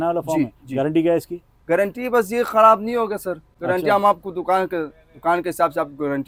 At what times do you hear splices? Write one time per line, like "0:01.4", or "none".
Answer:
none